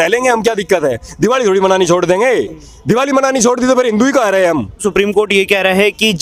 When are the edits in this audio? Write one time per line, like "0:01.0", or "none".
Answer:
0:05.0